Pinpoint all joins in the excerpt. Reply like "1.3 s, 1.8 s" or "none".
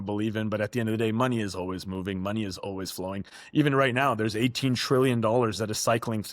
3.3 s